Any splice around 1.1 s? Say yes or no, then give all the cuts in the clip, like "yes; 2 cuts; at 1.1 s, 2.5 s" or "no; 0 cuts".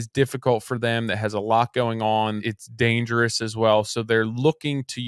no; 1 cut; at 2.4 s